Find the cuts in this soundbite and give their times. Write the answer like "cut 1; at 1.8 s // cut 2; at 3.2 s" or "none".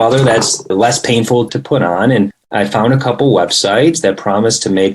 cut 1; at 1.5 s // cut 2; at 2.4 s